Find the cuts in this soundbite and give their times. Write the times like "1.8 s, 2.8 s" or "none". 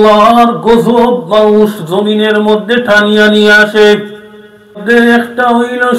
4.8 s